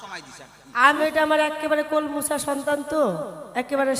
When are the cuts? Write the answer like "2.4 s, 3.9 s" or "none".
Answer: 1.0 s